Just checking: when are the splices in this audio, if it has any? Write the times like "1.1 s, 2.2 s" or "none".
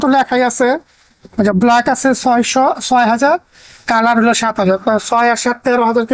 none